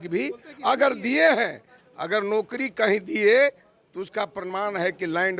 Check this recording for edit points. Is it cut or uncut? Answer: uncut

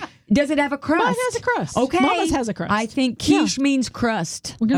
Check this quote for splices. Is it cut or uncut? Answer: uncut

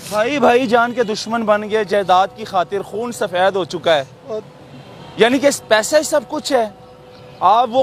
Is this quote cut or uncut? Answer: uncut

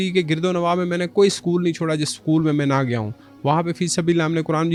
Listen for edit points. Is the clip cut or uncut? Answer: uncut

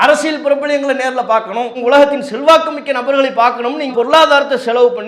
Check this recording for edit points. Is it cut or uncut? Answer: cut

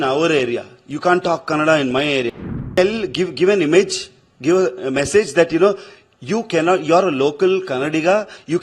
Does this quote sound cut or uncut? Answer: cut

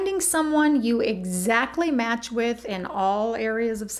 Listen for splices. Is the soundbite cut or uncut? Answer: uncut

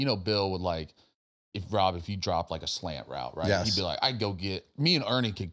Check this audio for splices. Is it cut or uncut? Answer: uncut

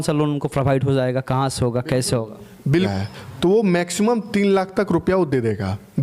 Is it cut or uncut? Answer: cut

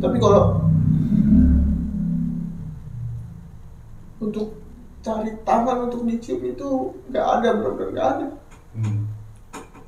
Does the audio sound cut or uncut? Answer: uncut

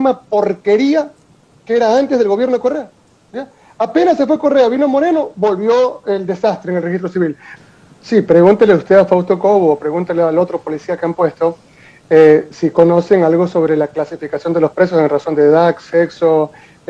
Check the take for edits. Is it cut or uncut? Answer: uncut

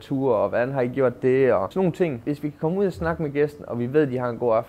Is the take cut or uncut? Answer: cut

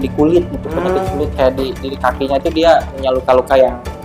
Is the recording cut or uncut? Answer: uncut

